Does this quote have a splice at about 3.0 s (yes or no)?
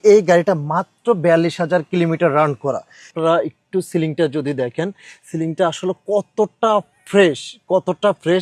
yes